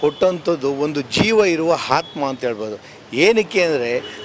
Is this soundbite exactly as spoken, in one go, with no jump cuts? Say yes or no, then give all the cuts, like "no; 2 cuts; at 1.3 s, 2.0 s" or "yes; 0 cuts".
yes; 0 cuts